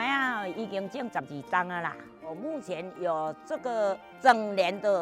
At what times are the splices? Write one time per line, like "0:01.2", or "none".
0:04.1